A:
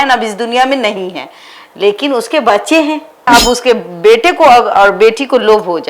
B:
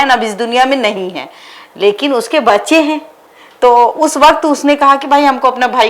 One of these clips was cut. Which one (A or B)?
A